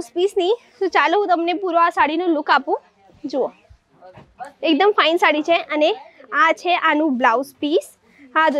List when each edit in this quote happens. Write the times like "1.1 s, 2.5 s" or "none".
none